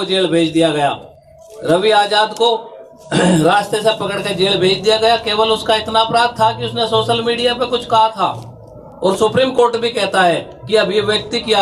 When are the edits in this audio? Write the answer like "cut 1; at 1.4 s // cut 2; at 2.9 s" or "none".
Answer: none